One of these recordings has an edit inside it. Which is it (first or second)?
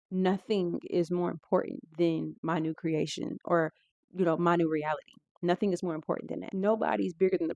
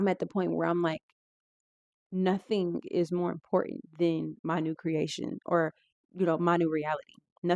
first